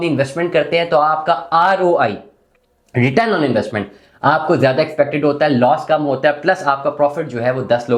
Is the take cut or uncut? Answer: uncut